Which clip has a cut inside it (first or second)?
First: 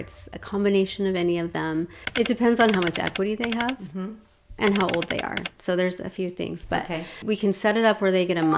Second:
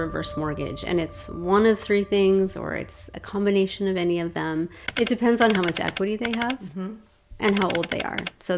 first